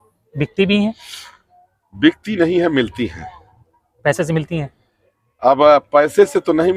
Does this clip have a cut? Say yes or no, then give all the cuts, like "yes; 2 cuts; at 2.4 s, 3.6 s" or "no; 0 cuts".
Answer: no; 0 cuts